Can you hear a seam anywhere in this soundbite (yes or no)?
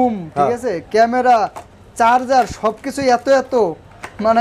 no